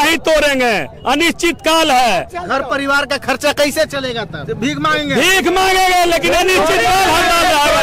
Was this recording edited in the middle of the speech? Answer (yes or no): no